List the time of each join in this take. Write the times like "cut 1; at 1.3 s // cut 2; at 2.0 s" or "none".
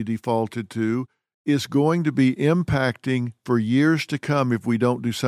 none

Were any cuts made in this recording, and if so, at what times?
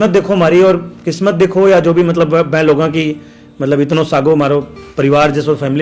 none

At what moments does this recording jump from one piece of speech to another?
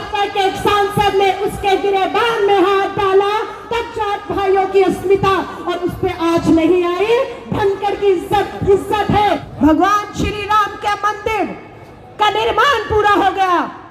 cut 1; at 9.5 s

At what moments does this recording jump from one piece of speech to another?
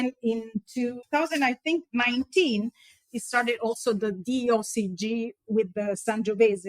cut 1; at 1.0 s

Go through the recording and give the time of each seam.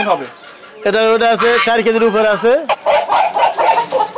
cut 1; at 2.8 s

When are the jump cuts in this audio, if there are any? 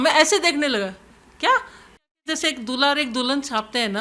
cut 1; at 2.2 s

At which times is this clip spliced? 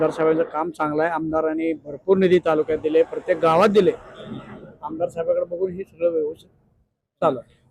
none

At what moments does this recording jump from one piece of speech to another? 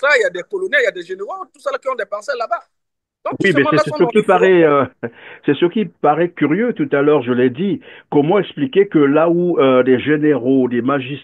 none

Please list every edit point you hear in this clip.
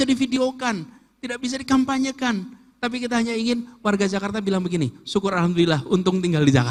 none

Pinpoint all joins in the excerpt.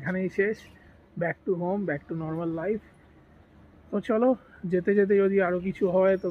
none

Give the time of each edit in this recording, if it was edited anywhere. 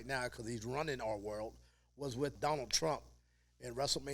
cut 1; at 2.4 s

